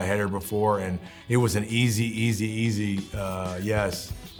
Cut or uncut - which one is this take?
uncut